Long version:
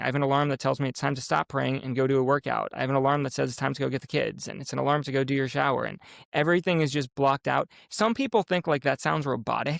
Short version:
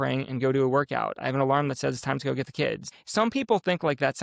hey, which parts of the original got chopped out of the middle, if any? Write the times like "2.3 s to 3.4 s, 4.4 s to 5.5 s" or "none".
4.5 s to 7.8 s